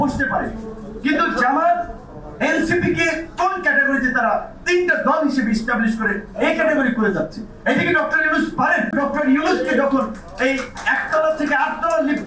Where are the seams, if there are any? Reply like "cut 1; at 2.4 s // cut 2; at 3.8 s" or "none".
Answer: cut 1; at 8.9 s